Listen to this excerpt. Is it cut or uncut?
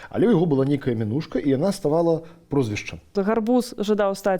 cut